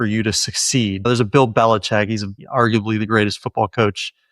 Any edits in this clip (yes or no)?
yes